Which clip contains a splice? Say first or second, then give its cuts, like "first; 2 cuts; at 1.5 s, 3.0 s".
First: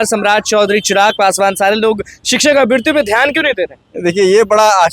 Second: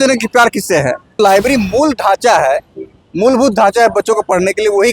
second; 1 cut; at 1.2 s